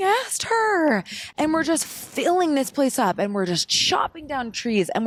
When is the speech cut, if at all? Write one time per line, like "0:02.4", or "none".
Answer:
none